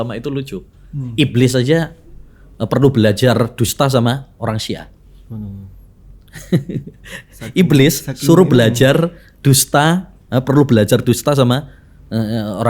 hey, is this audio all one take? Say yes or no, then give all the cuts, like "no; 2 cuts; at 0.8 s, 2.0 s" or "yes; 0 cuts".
yes; 0 cuts